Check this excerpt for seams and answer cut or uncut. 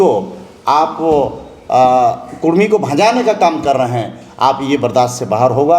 uncut